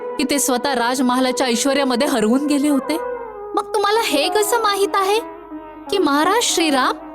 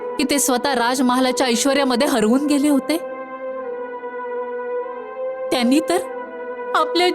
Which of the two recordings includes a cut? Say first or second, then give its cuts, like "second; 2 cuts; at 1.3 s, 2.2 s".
first; 1 cut; at 3.1 s